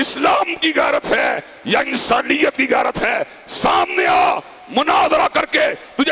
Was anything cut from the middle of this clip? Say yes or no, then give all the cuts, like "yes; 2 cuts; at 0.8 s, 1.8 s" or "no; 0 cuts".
no; 0 cuts